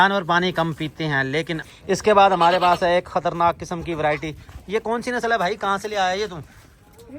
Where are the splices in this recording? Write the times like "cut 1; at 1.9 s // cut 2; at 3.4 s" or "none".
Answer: cut 1; at 1.6 s